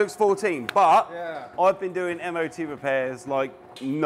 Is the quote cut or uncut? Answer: uncut